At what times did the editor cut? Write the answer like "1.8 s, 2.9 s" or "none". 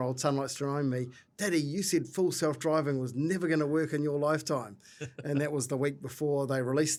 none